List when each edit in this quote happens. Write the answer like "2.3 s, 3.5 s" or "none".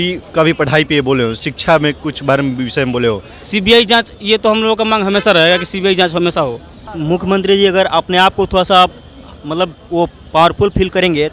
3.4 s, 6.9 s